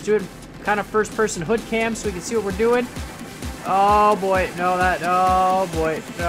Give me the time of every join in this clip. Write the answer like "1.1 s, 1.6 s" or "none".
none